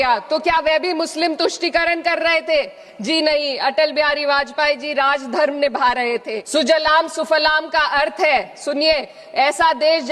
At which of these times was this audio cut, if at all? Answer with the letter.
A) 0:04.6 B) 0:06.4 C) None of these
B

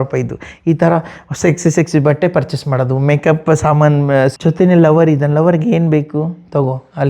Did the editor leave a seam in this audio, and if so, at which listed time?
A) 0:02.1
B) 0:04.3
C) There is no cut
B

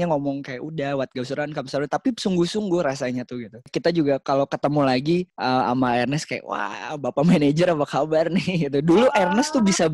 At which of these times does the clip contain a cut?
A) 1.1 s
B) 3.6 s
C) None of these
B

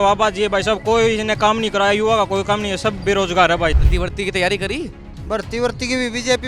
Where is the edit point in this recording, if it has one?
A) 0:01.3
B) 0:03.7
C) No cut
B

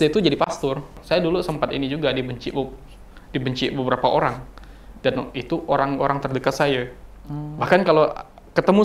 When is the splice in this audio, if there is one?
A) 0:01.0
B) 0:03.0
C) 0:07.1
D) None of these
A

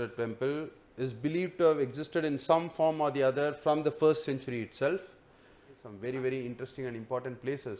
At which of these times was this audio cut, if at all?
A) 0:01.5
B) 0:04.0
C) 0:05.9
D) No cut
C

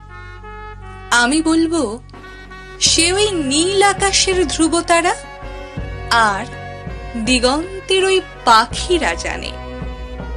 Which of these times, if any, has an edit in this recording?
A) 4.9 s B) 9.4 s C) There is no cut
B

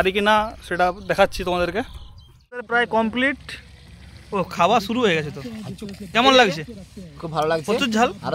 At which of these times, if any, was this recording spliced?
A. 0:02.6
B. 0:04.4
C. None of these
A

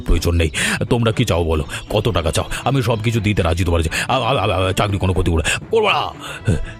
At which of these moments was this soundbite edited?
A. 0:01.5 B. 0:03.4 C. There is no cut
C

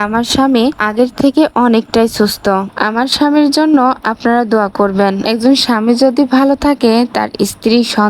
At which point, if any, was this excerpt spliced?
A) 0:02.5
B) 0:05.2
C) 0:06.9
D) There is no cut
B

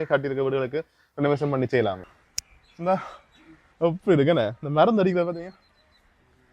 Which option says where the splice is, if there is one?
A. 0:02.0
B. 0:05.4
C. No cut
A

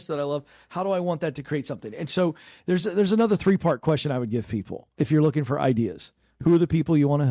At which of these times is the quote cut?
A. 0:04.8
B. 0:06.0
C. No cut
C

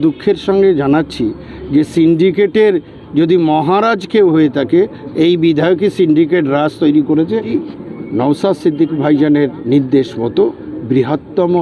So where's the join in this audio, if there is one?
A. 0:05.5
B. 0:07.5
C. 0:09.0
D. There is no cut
B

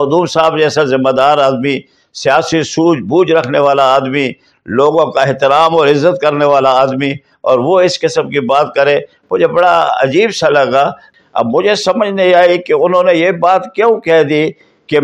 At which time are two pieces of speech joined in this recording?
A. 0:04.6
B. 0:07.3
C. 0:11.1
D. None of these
C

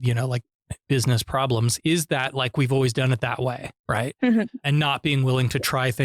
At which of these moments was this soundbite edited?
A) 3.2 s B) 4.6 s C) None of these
B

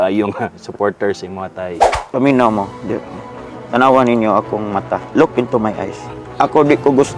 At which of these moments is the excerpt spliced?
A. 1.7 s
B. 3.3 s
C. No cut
A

